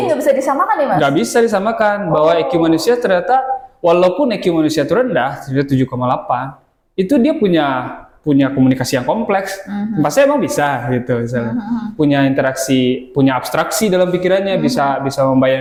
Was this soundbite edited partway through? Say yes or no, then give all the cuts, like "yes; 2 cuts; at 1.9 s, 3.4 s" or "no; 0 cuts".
no; 0 cuts